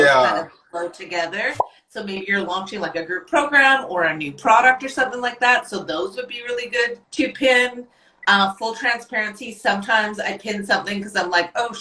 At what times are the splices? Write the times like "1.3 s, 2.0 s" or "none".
none